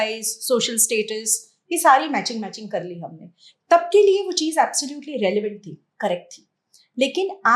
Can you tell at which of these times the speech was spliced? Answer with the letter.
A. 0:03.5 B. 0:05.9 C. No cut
A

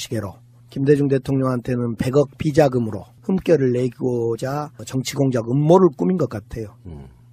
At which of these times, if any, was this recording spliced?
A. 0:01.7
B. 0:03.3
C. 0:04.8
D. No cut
C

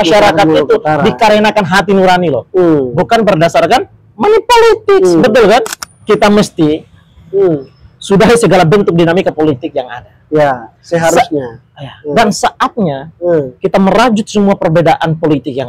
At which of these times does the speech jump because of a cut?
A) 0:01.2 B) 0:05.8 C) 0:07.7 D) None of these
B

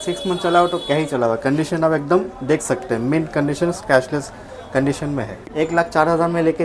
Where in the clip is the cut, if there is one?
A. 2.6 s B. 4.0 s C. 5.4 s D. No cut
C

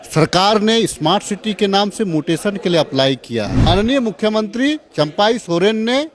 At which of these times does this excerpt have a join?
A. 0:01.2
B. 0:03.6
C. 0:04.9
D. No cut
B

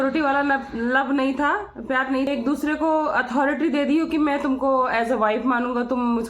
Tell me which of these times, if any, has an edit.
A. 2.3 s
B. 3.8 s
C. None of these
A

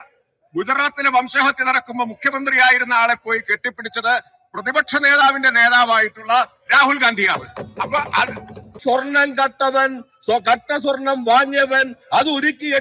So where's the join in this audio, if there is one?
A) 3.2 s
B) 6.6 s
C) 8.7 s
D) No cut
C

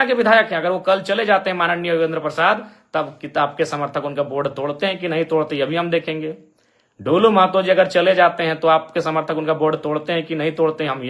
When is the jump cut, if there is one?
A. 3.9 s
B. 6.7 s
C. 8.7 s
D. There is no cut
D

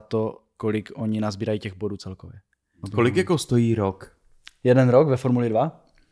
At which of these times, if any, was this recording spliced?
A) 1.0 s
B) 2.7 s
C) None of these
B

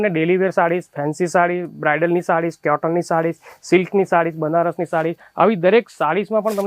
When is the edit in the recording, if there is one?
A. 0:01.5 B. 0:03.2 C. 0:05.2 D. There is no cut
D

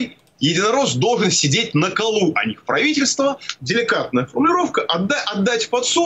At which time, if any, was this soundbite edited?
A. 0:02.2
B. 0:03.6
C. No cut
B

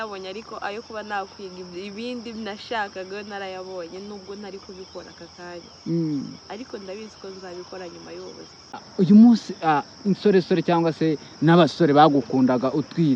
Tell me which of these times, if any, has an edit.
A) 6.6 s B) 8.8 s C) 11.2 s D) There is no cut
B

